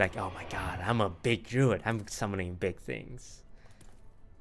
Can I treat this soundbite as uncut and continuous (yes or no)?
yes